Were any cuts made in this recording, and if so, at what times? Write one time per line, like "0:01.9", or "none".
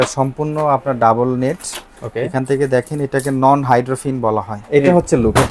0:04.6